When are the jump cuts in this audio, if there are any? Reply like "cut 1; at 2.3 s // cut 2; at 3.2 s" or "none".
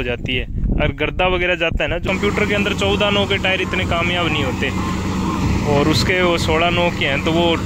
cut 1; at 2.0 s